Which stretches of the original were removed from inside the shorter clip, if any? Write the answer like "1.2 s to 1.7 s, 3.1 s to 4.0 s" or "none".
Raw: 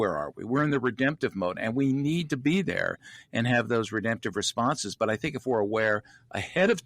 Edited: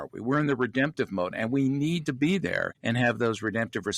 3.0 s to 3.2 s

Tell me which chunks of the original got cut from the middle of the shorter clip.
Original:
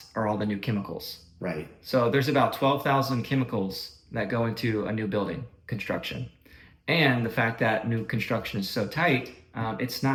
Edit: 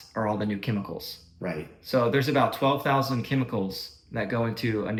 none

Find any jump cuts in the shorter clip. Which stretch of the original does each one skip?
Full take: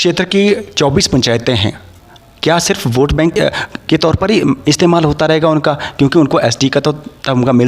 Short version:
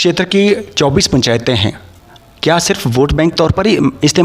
3.4 s to 4.0 s

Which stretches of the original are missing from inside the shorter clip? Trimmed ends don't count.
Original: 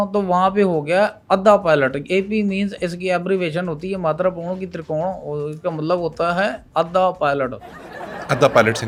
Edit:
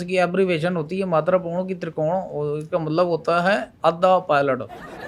none

